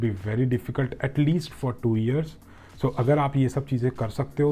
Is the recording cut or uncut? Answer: uncut